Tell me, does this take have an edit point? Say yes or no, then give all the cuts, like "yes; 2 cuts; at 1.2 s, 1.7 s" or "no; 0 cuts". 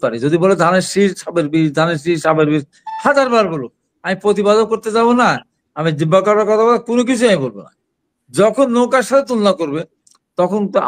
no; 0 cuts